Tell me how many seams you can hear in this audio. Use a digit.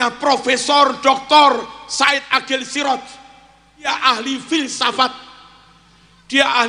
1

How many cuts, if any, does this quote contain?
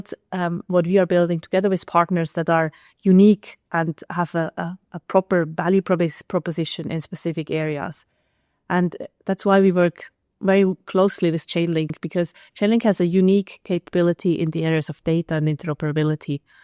1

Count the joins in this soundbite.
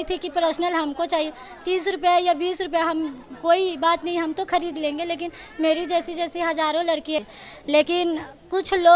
1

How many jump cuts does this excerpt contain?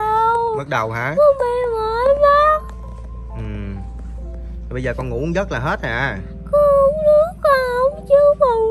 0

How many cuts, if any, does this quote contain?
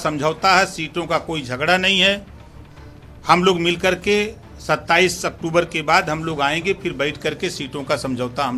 0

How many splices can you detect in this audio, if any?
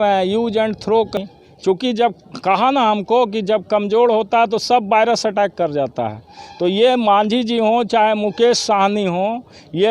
1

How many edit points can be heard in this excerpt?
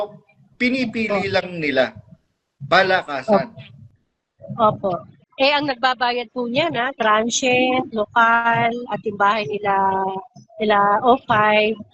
1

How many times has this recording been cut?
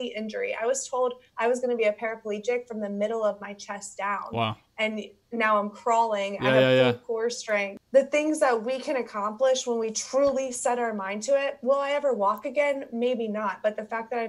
2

